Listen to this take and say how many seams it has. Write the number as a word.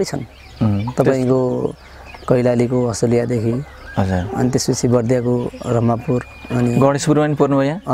zero